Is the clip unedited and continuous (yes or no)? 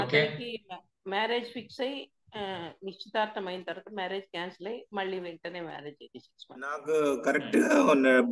no